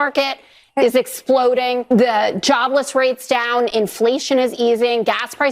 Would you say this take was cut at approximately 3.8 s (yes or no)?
no